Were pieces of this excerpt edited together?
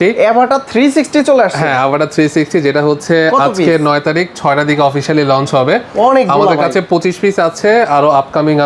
no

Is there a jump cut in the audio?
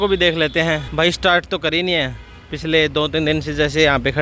no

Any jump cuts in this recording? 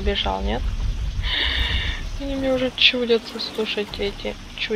no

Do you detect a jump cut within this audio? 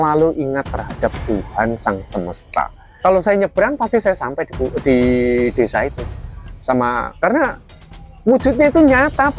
yes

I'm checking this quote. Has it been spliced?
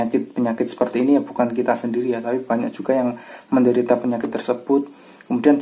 no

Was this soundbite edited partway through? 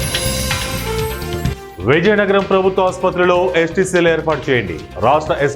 yes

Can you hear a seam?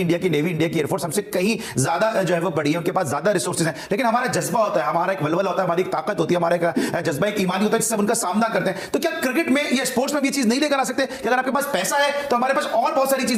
no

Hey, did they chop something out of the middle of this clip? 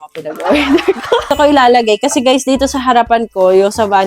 yes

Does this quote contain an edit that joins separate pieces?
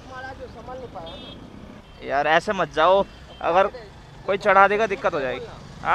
yes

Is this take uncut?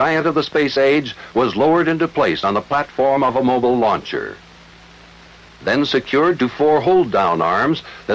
yes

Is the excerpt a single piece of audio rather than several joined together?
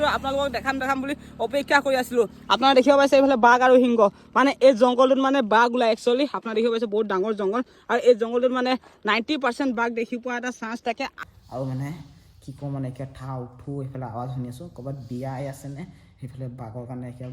no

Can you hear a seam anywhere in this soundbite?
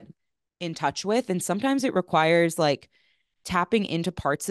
no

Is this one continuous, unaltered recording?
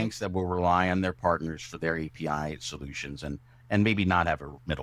yes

